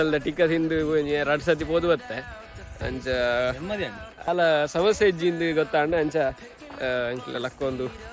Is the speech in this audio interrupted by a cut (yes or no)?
yes